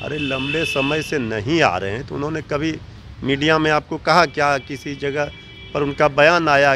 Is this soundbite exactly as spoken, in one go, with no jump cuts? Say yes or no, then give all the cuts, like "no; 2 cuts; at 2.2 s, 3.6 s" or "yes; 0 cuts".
yes; 0 cuts